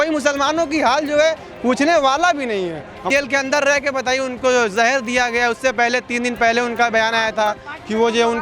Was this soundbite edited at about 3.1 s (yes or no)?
yes